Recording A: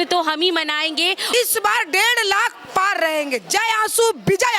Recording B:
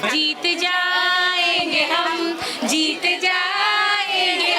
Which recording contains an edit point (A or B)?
A